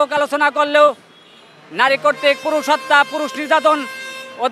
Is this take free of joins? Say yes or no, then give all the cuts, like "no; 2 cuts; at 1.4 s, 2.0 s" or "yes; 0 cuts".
yes; 0 cuts